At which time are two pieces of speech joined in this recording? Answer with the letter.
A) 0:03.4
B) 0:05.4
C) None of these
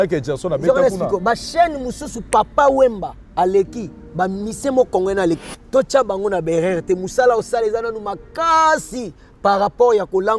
B